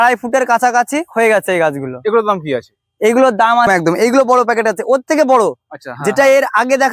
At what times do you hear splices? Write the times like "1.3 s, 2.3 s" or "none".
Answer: 3.7 s